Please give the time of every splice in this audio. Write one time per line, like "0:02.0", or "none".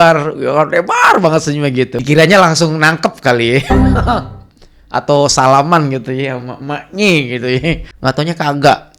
0:02.0